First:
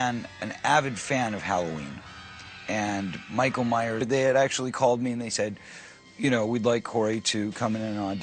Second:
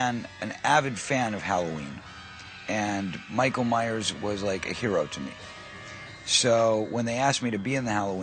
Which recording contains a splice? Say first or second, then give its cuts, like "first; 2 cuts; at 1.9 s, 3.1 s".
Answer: second; 1 cut; at 4.0 s